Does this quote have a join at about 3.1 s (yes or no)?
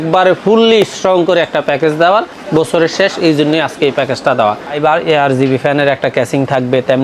no